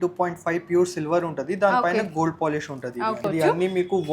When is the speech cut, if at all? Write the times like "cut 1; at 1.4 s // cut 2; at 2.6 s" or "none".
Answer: cut 1; at 3.2 s